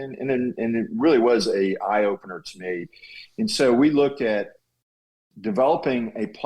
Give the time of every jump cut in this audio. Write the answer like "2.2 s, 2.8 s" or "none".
5.0 s